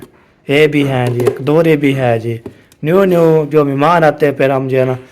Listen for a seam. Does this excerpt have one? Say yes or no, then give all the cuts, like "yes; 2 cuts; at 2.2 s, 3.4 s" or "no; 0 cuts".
no; 0 cuts